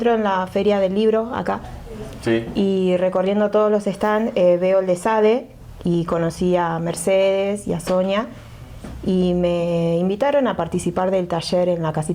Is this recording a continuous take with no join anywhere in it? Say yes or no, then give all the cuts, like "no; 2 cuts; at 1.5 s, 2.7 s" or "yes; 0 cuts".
yes; 0 cuts